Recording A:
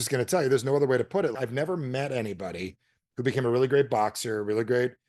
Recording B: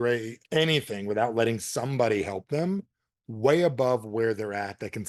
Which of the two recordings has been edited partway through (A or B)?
A